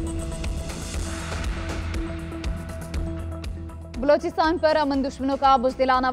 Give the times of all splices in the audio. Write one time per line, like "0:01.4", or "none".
0:03.3

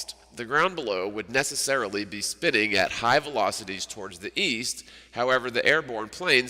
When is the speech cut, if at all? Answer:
0:03.0

